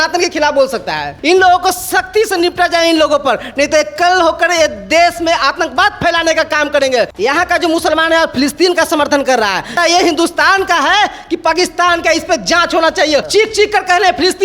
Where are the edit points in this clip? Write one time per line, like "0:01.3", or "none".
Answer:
0:01.1
0:07.1
0:09.8
0:13.3